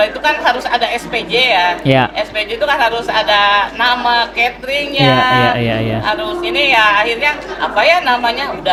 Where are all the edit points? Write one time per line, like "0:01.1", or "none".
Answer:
none